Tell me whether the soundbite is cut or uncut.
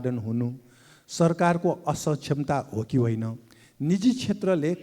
uncut